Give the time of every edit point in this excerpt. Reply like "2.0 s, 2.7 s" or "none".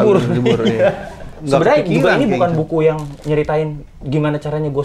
1.4 s